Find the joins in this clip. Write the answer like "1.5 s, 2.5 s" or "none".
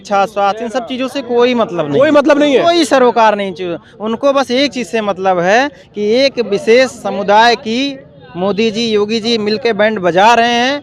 none